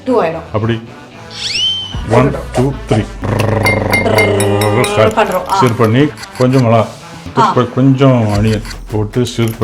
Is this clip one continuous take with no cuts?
no; 3 cuts; at 3.2 s, 6.1 s, 8.8 s

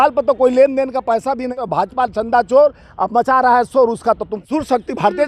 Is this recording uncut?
no; 2 cuts; at 1.6 s, 4.4 s

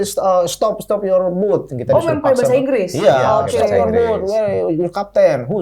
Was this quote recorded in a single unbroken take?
yes; 0 cuts

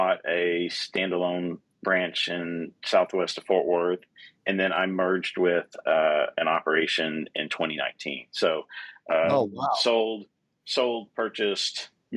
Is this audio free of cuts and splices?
yes; 0 cuts

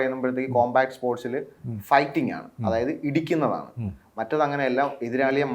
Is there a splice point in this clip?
no; 0 cuts

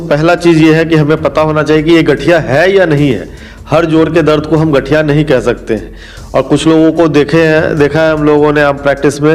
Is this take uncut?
yes; 0 cuts

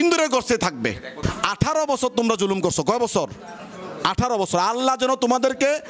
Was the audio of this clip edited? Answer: yes; 1 cut; at 1.2 s

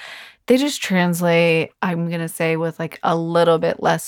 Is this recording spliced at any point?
yes; 1 cut; at 1.7 s

